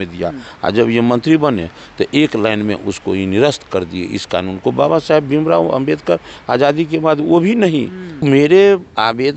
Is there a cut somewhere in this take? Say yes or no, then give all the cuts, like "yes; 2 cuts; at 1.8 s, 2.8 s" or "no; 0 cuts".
yes; 1 cut; at 8.2 s